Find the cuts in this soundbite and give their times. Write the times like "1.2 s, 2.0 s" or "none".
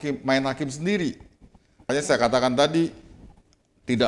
1.9 s